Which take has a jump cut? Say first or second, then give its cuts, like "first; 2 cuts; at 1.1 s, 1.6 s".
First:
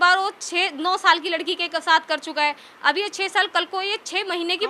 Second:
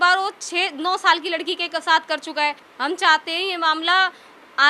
second; 1 cut; at 2.7 s